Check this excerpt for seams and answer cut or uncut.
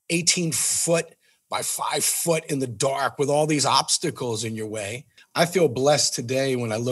cut